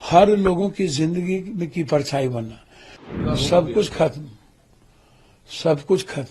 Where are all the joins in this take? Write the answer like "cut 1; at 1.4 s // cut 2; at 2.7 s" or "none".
cut 1; at 3.1 s